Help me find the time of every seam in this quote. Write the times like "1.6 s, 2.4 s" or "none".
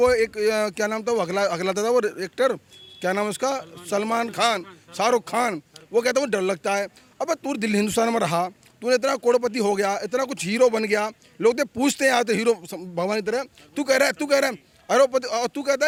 none